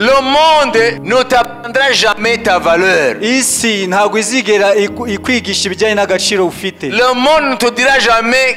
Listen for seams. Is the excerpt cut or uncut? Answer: cut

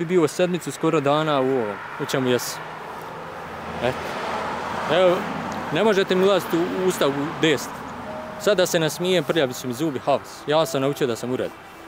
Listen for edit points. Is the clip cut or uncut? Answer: uncut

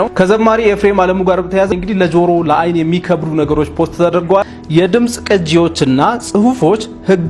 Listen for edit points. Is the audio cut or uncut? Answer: cut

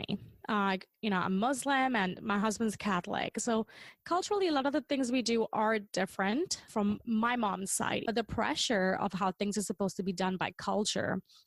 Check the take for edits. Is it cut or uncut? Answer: cut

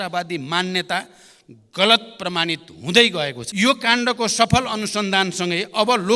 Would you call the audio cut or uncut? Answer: cut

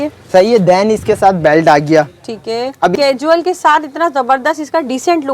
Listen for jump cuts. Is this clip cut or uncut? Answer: cut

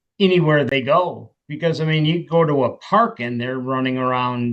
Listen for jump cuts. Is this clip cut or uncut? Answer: uncut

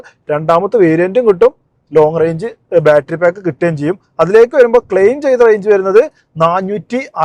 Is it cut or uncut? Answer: uncut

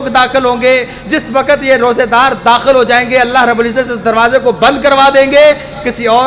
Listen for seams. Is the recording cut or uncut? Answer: uncut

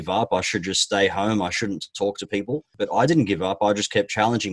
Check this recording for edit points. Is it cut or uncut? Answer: cut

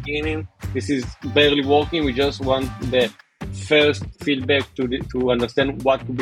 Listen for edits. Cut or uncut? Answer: uncut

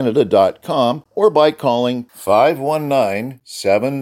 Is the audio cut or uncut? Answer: cut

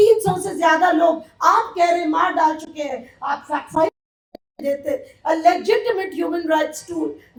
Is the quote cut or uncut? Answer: uncut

